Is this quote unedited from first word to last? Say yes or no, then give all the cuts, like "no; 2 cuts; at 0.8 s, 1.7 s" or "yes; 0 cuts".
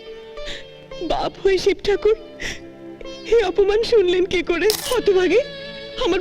no; 1 cut; at 4.8 s